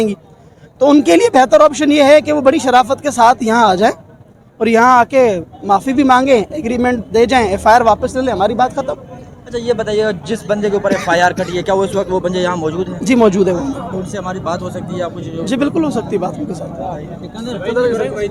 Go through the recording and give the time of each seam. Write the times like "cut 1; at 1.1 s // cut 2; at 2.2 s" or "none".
none